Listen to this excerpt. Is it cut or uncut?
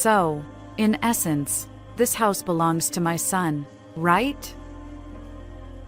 cut